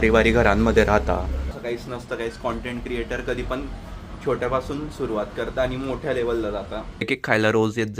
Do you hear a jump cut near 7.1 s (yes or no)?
yes